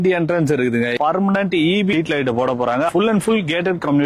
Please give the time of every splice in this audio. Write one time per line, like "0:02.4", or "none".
0:00.9
0:01.9
0:02.9